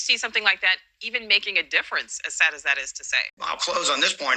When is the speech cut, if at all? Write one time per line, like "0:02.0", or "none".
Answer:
0:03.3